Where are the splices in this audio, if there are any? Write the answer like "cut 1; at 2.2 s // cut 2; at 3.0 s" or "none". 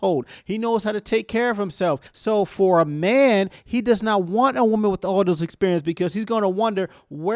cut 1; at 2.1 s